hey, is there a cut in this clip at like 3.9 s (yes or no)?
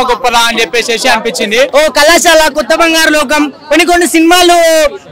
no